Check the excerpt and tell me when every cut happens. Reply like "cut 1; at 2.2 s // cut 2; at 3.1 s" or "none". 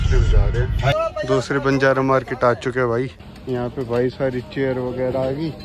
cut 1; at 0.9 s // cut 2; at 3.3 s